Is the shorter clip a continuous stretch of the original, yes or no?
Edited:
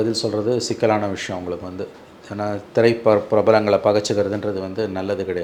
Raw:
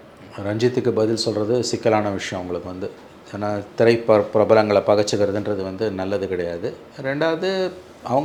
yes